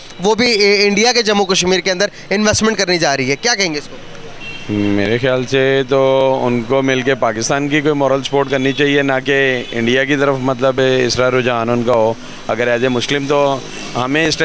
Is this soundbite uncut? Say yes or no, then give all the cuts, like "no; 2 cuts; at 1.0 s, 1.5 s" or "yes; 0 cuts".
yes; 0 cuts